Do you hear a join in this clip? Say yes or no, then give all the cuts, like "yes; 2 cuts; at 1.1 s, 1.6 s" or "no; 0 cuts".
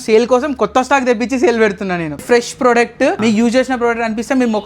yes; 2 cuts; at 2.2 s, 3.2 s